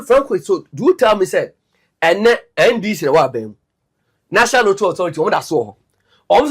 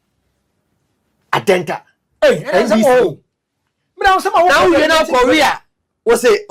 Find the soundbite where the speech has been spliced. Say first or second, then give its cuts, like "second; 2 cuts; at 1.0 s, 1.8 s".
first; 1 cut; at 1.3 s